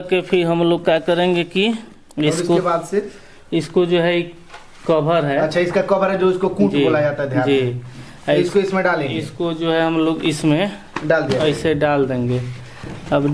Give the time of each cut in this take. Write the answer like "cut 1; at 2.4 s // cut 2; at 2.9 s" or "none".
none